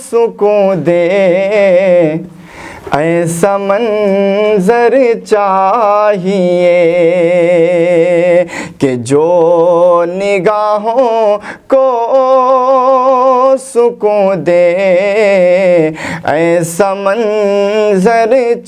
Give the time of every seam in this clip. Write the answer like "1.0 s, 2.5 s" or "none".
none

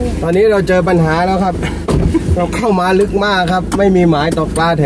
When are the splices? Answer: none

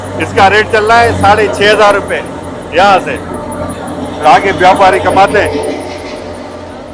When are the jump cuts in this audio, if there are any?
none

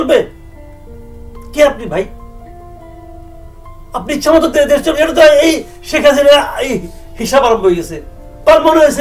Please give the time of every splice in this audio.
none

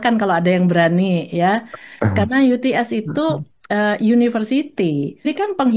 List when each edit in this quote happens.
none

